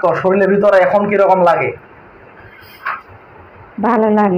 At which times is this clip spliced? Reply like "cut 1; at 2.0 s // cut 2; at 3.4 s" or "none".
none